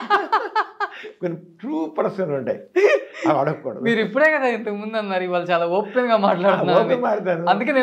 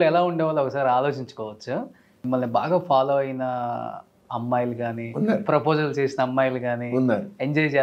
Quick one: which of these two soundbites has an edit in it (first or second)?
second